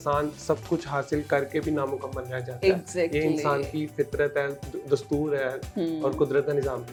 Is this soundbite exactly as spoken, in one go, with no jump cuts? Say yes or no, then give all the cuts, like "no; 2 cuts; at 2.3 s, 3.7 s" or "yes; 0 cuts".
yes; 0 cuts